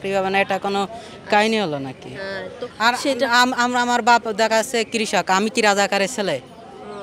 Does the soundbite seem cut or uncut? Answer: uncut